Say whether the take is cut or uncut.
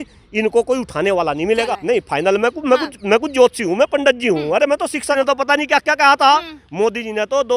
cut